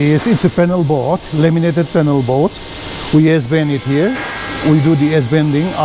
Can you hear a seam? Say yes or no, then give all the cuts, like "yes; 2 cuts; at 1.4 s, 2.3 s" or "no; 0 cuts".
no; 0 cuts